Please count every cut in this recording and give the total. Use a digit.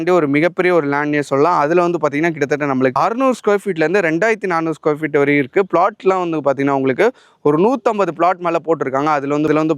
0